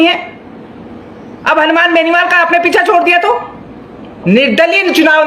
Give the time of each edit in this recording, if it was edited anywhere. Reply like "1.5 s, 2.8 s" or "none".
4.2 s